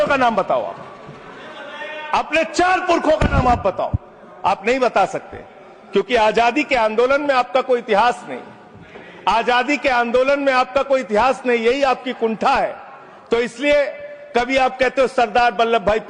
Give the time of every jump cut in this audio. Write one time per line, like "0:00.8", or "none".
none